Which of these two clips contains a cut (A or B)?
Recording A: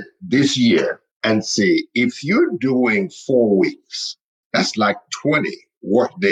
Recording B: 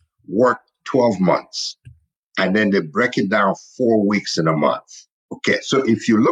A